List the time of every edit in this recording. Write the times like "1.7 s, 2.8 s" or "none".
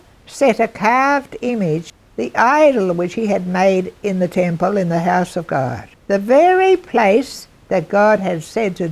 2.0 s, 5.9 s